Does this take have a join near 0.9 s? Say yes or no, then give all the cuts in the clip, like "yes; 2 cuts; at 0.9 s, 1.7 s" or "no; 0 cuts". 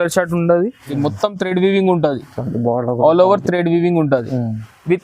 yes; 1 cut; at 0.9 s